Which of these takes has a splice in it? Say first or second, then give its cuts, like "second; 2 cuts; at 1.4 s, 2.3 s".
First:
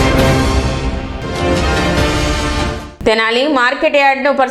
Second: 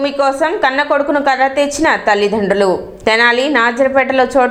first; 2 cuts; at 0.9 s, 2.8 s